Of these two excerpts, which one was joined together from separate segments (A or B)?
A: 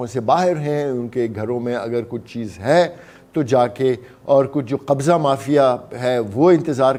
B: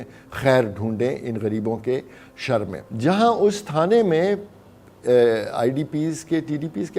B